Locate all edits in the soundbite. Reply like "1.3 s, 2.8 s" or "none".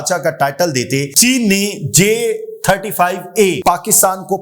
1.1 s, 3.6 s